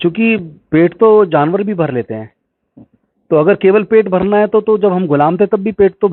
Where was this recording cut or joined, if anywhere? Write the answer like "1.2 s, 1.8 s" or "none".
none